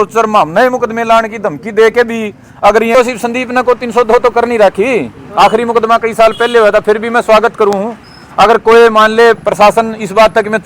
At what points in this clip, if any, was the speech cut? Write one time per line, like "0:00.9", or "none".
0:02.9

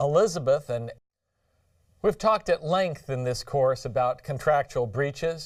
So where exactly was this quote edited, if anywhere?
none

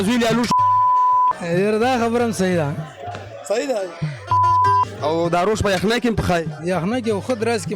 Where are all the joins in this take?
0:06.5

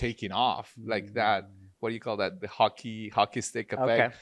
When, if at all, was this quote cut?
none

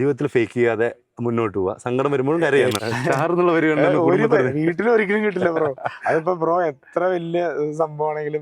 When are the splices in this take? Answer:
0:02.8

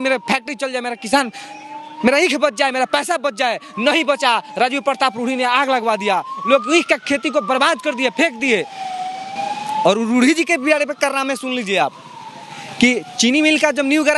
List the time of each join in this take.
none

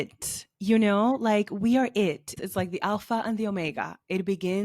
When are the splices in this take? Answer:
0:02.4

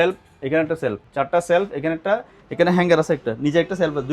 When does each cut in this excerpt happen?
0:01.0

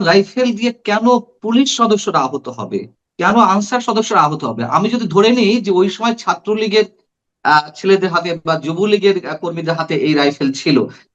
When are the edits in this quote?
none

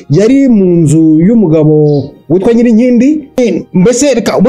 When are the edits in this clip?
0:03.4

